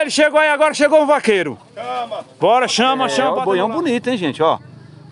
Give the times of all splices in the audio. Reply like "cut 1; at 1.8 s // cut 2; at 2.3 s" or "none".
cut 1; at 3.3 s